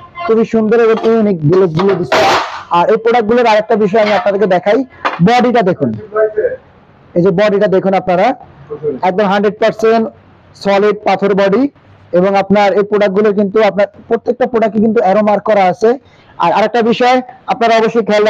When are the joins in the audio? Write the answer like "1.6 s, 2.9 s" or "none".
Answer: none